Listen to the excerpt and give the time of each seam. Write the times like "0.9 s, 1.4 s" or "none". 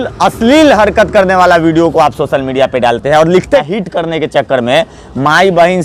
3.6 s